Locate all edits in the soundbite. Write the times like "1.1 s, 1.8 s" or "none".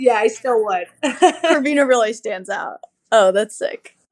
1.5 s